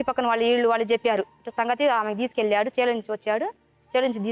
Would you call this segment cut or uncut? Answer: uncut